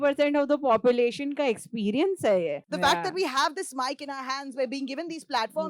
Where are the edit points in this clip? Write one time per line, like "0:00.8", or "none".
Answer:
0:02.6